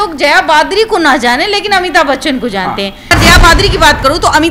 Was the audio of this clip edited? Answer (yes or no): yes